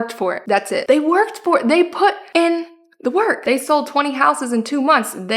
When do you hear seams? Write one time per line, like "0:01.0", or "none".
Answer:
0:03.4